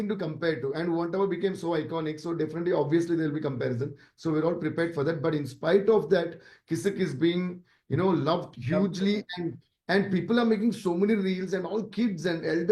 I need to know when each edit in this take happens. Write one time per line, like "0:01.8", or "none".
none